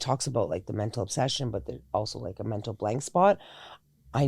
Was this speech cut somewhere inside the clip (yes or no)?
no